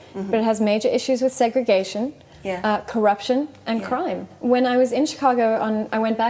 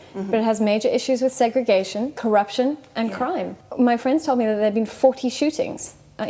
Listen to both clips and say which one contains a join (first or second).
second